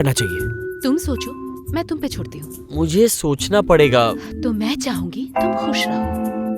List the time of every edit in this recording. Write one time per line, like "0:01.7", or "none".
0:04.3